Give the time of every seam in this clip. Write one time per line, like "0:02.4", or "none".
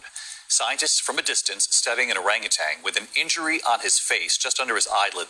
0:01.5